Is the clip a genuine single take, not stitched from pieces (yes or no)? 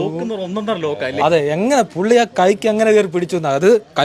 yes